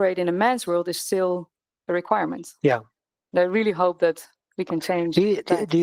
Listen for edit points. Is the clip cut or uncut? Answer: uncut